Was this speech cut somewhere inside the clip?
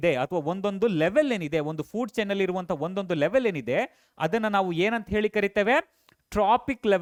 no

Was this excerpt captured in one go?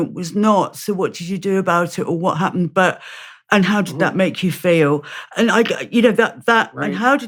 yes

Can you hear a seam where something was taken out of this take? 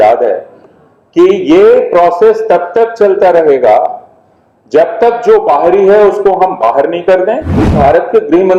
yes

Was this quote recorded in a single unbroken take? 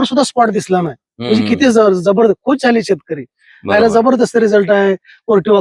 yes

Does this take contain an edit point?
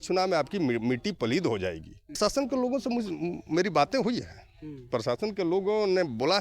yes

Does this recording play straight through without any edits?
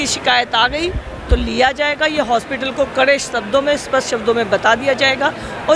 yes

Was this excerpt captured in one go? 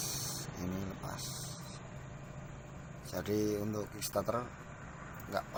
yes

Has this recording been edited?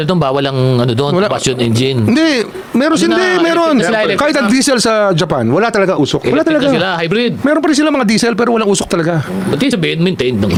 no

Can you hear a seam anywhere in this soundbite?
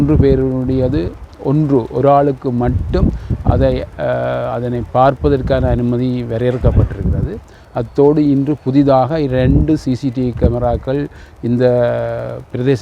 no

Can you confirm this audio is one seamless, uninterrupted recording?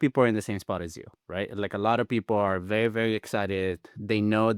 yes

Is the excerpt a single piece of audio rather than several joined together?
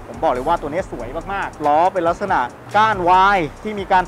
no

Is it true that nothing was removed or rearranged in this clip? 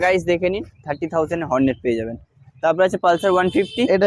yes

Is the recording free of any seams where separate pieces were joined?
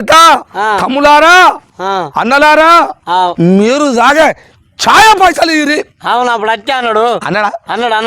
yes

